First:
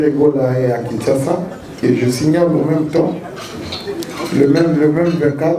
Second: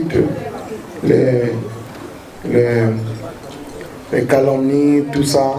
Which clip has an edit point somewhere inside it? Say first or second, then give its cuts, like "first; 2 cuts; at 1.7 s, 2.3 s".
first; 1 cut; at 1.8 s